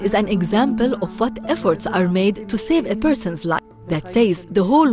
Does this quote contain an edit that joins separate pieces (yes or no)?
yes